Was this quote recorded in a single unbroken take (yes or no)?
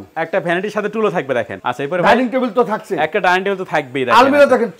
no